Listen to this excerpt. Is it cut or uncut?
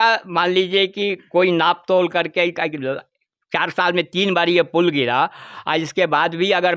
uncut